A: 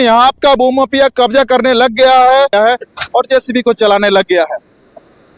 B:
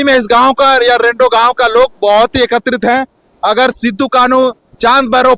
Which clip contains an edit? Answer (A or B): A